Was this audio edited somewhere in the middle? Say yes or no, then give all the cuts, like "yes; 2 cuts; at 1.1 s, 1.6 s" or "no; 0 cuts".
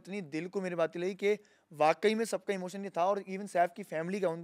no; 0 cuts